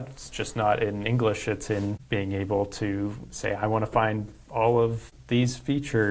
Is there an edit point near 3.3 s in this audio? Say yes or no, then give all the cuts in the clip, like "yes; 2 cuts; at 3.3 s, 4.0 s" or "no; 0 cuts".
no; 2 cuts; at 2.0 s, 5.1 s